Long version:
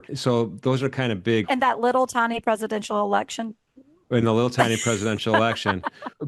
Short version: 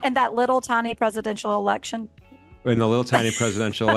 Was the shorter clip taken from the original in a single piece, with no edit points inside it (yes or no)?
yes